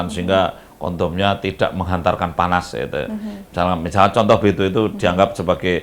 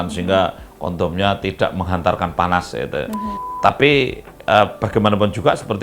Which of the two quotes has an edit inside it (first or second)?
second